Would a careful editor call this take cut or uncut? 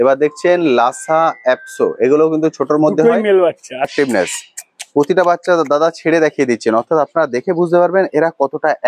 cut